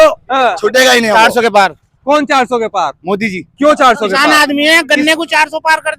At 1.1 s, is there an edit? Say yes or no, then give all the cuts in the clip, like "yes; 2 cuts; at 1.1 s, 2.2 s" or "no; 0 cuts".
yes; 2 cuts; at 1.1 s, 4.2 s